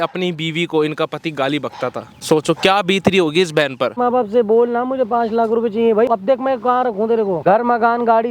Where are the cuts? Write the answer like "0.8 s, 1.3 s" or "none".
2.1 s, 4.0 s, 6.1 s, 7.4 s